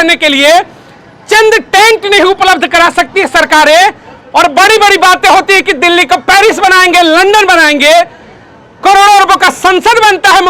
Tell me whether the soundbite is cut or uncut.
uncut